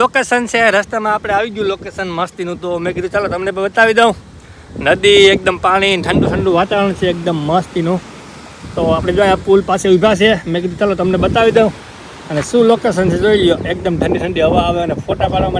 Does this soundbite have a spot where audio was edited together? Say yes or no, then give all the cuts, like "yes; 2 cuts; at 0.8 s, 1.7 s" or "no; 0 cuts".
no; 0 cuts